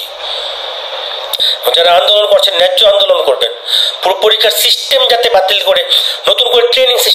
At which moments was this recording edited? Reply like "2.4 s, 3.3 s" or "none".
1.3 s